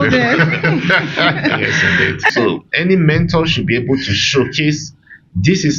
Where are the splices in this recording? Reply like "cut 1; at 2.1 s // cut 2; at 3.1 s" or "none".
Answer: cut 1; at 2.3 s